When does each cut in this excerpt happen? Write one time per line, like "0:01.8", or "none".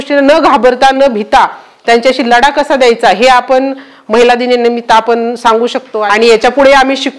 0:05.9

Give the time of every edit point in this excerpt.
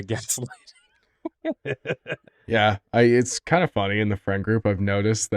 0:02.1

